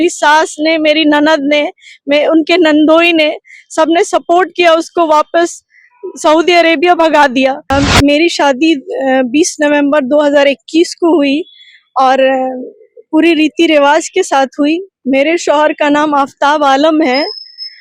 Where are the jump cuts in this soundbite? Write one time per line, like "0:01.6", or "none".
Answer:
0:07.6